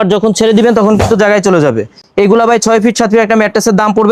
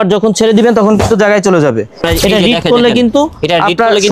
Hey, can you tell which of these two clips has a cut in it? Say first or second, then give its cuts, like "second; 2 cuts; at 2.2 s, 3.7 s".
second; 1 cut; at 2.1 s